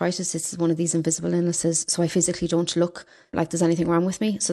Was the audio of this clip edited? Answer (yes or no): no